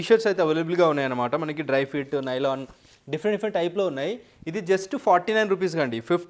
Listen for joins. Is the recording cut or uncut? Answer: uncut